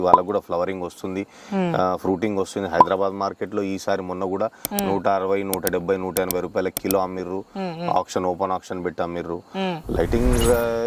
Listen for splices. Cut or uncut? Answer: uncut